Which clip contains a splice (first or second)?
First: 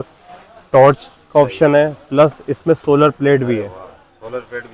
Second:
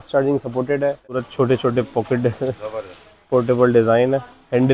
second